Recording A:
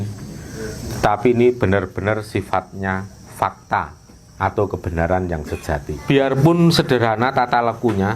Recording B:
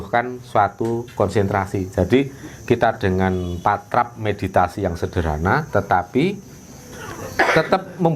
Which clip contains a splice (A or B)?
A